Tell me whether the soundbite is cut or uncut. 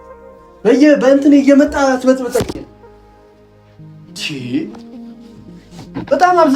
uncut